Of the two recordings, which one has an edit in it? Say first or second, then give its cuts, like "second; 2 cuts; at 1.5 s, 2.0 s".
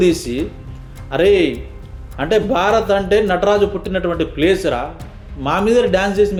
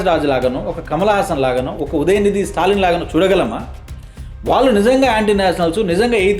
second; 1 cut; at 1.7 s